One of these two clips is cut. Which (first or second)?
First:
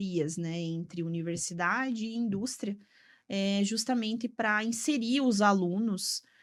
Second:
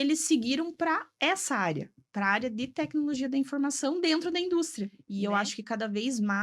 second